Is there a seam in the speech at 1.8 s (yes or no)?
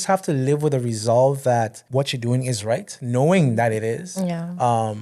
yes